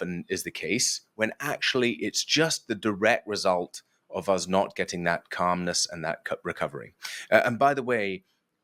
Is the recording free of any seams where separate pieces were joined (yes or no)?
yes